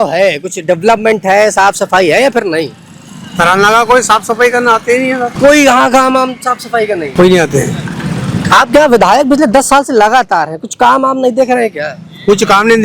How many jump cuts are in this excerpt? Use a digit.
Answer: 2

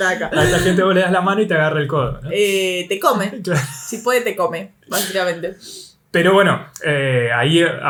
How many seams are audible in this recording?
0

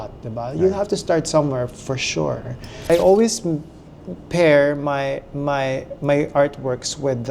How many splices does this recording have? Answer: 1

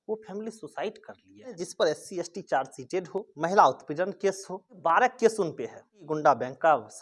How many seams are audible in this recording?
4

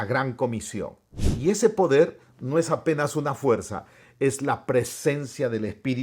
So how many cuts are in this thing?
1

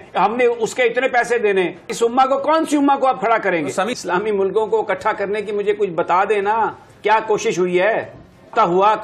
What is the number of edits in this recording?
1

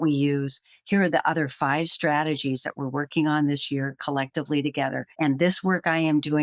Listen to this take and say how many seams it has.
1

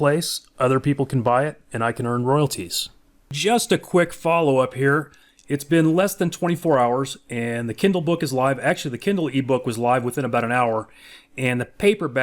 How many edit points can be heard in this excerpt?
1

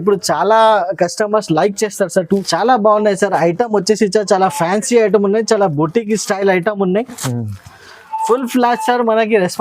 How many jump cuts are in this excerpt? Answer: 1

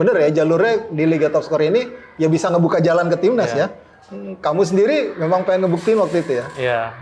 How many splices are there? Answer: 0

